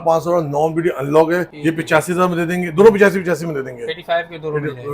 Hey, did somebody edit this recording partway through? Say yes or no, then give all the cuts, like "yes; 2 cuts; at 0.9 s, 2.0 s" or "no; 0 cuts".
yes; 1 cut; at 1.5 s